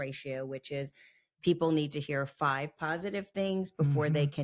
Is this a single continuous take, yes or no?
yes